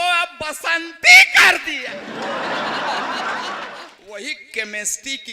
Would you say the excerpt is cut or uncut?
cut